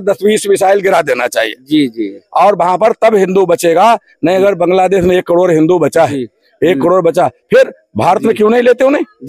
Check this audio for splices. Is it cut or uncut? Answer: uncut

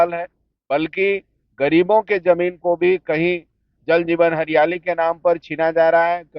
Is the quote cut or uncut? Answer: uncut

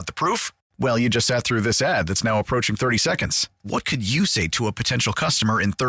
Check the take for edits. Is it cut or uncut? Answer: uncut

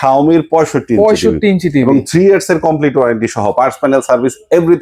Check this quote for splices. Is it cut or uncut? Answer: uncut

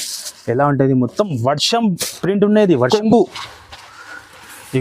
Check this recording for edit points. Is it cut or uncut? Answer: cut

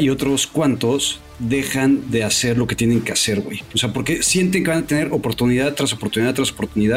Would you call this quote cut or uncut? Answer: uncut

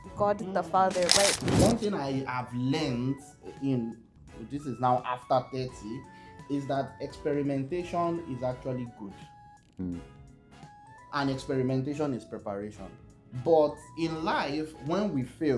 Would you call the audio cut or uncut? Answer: cut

